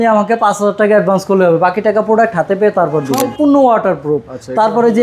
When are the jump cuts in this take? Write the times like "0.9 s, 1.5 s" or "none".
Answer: 3.2 s